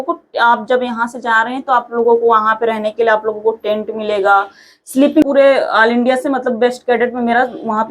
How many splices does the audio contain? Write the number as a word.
one